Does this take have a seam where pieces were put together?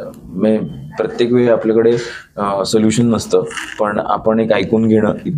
no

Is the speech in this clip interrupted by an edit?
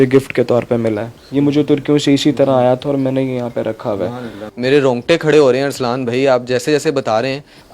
no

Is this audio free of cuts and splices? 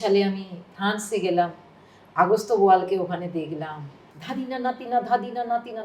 no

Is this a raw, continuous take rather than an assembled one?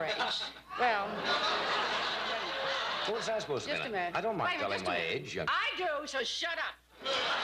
yes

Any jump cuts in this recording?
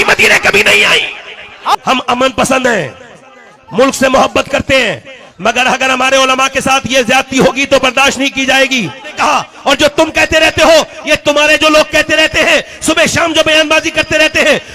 yes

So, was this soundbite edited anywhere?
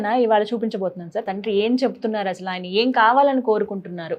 yes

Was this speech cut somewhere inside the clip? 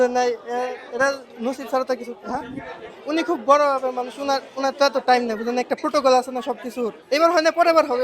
yes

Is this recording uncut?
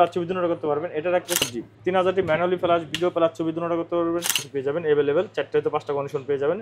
no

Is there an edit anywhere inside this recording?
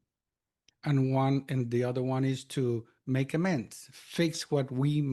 no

